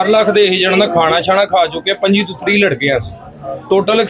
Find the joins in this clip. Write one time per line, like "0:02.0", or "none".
none